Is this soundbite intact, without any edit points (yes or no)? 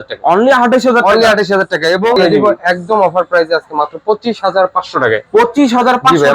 no